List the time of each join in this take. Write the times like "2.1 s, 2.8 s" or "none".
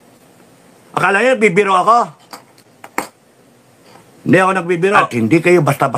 5.1 s